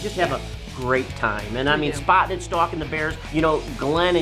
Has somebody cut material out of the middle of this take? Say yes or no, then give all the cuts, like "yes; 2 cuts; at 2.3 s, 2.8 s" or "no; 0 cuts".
yes; 1 cut; at 3.2 s